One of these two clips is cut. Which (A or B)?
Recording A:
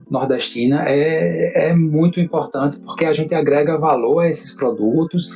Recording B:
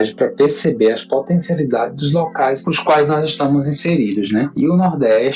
B